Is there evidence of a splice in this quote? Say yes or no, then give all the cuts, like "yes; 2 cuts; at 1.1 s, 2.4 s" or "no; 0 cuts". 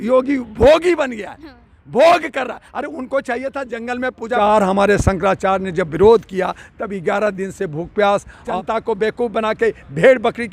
yes; 2 cuts; at 4.4 s, 8.4 s